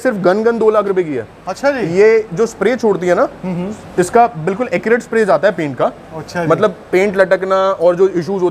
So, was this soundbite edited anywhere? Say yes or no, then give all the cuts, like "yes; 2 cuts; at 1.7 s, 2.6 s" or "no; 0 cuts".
no; 0 cuts